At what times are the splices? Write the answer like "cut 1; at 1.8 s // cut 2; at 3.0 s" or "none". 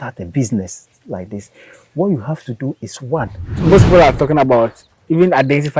cut 1; at 3.6 s